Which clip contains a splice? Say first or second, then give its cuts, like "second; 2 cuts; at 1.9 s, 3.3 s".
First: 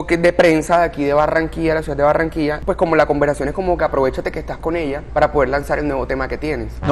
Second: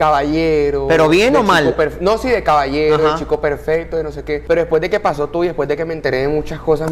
first; 1 cut; at 2.6 s